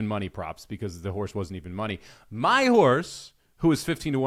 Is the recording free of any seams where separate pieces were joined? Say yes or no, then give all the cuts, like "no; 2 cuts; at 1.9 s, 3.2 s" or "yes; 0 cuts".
yes; 0 cuts